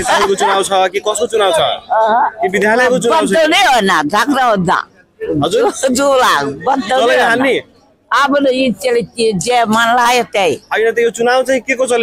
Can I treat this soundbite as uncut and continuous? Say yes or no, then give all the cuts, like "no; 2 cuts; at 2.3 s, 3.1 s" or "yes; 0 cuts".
yes; 0 cuts